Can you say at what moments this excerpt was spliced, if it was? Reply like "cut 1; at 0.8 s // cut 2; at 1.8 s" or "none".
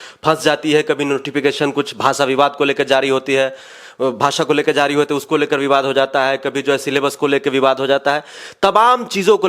none

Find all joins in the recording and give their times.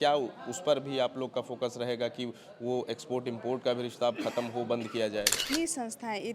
cut 1; at 5.4 s

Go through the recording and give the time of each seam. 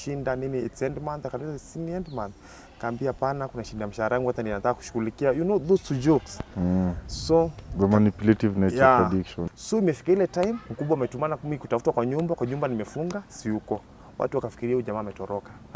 cut 1; at 9.4 s

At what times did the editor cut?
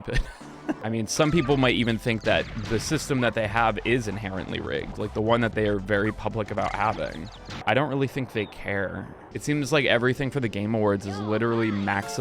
cut 1; at 0.8 s // cut 2; at 7.6 s // cut 3; at 9.2 s

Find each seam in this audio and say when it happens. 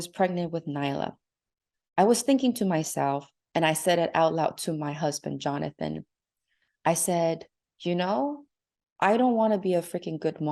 none

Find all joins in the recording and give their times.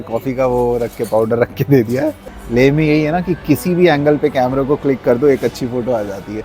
cut 1; at 2.3 s

